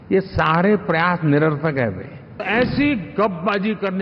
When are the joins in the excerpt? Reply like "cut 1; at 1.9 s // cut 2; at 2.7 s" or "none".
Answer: cut 1; at 2.4 s